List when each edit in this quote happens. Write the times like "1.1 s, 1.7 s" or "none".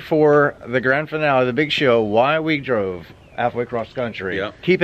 none